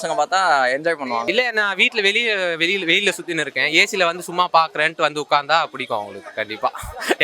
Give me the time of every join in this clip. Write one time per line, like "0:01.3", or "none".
0:01.2